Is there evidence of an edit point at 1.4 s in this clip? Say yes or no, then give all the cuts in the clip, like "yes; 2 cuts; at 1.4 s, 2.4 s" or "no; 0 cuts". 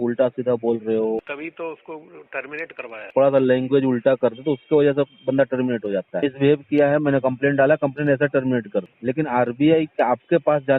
yes; 4 cuts; at 1.4 s, 3.1 s, 6.1 s, 8.9 s